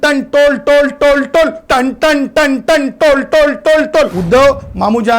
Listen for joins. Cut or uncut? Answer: cut